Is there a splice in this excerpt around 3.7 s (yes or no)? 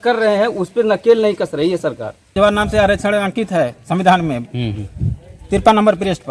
no